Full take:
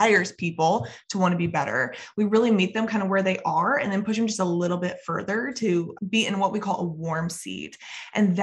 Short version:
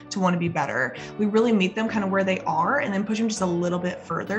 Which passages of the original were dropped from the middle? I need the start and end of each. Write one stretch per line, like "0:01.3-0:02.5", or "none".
none

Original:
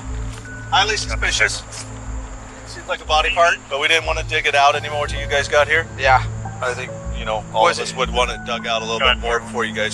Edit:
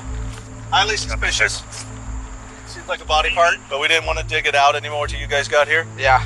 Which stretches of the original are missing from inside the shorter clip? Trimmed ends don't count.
none

